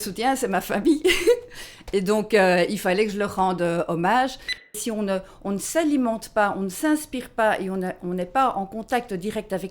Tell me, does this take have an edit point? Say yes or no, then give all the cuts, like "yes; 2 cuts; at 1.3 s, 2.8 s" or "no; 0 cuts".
yes; 1 cut; at 4.8 s